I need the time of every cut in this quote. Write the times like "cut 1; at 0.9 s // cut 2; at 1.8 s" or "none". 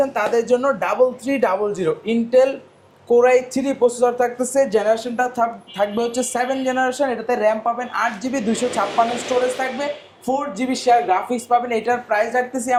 none